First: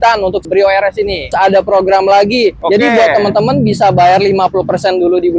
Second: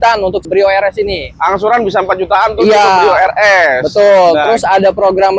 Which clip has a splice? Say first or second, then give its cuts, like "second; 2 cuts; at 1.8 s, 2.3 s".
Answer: first; 2 cuts; at 1.3 s, 2.6 s